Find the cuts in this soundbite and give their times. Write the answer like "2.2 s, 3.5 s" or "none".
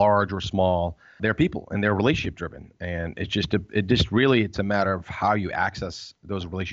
1.2 s